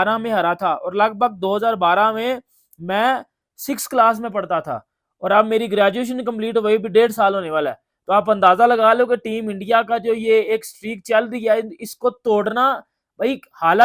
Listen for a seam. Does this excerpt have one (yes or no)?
no